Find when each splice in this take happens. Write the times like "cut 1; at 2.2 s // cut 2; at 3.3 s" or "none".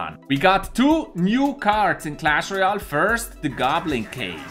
none